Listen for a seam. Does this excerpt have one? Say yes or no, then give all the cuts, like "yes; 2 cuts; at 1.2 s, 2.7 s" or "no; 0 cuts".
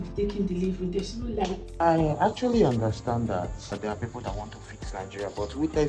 yes; 2 cuts; at 1.7 s, 3.7 s